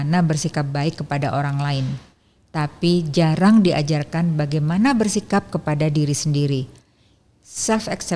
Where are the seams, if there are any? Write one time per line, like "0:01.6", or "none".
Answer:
0:07.2